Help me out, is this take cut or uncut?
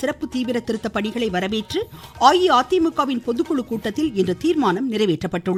uncut